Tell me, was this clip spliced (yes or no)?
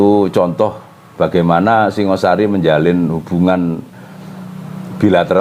no